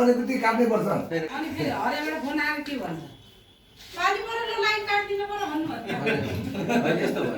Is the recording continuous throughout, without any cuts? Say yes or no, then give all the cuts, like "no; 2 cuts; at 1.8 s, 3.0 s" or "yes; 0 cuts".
no; 1 cut; at 1.3 s